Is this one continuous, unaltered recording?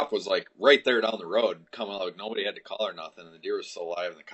yes; 0 cuts

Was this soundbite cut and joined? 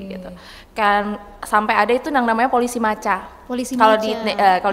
no; 0 cuts

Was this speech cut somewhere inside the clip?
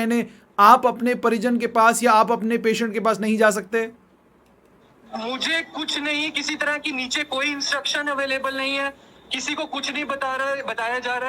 no; 0 cuts

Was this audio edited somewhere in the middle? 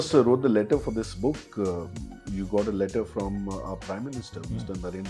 no; 0 cuts

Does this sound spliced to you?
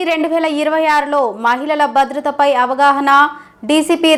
no; 0 cuts

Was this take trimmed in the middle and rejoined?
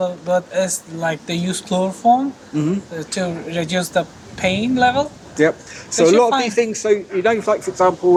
no; 0 cuts

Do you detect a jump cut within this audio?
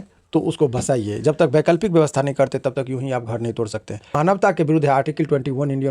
yes; 1 cut; at 4.1 s

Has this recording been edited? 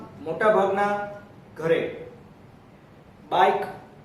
no; 0 cuts

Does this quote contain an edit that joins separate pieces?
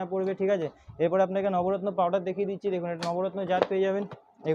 no; 0 cuts

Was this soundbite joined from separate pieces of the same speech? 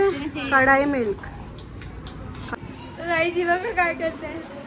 yes; 1 cut; at 2.5 s

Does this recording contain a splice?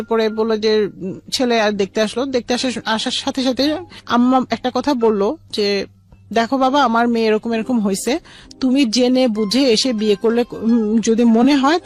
no; 0 cuts

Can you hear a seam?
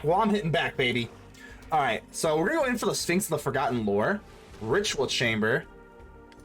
no; 0 cuts

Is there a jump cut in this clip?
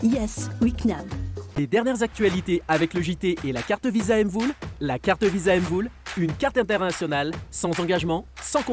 yes; 1 cut; at 1.5 s

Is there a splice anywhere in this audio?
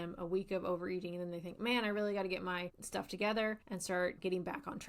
yes; 2 cuts; at 2.8 s, 3.9 s

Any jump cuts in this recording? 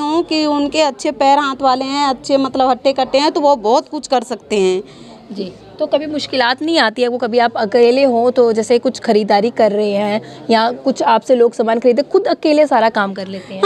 no; 0 cuts

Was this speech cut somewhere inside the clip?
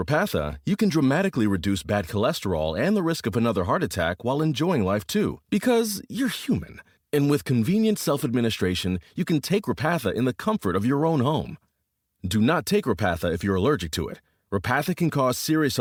no; 0 cuts

